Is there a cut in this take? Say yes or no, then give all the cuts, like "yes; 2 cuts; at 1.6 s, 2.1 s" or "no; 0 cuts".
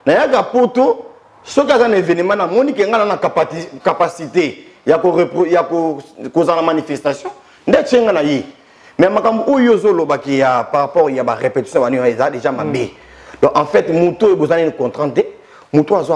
no; 0 cuts